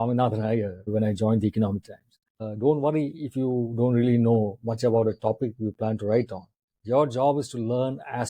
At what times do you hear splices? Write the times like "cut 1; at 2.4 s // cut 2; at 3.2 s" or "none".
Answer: cut 1; at 0.9 s // cut 2; at 2.3 s